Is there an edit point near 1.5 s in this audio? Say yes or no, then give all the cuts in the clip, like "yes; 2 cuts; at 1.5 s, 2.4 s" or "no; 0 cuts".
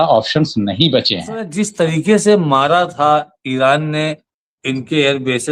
yes; 1 cut; at 1.5 s